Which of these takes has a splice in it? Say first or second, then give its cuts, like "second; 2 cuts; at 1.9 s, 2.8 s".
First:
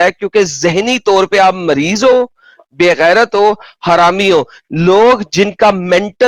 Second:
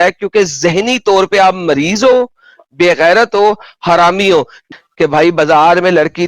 second; 1 cut; at 4.6 s